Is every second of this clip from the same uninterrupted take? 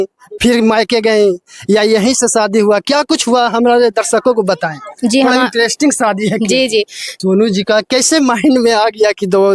no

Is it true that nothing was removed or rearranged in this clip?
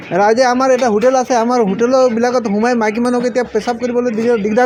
yes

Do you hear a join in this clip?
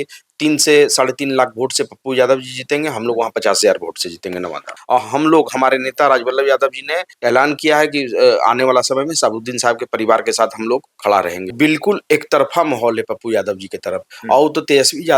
yes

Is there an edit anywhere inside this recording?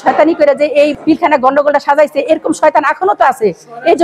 no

